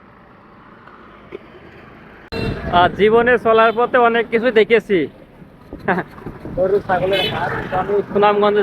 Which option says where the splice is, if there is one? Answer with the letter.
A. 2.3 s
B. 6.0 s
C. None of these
A